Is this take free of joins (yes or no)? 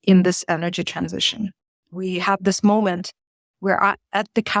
no